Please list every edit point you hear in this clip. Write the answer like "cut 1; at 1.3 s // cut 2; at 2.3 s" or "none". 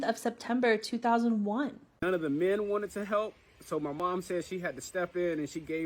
cut 1; at 1.9 s